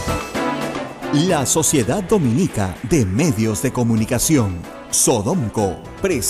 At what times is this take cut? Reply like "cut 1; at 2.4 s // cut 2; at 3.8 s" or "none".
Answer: cut 1; at 0.9 s